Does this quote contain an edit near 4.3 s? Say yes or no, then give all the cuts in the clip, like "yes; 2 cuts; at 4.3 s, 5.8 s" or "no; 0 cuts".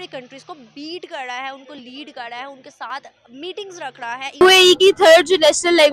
yes; 1 cut; at 4.3 s